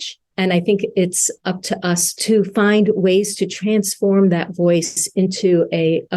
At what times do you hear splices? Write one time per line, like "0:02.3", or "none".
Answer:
0:02.1